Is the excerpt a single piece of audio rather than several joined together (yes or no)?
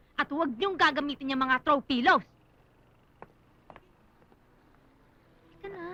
yes